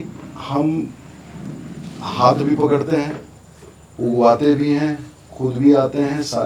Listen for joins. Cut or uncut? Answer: uncut